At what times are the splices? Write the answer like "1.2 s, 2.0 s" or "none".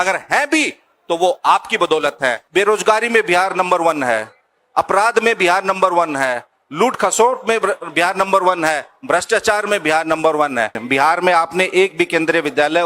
2.4 s, 10.8 s